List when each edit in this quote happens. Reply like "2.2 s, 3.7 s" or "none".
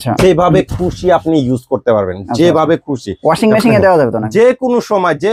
none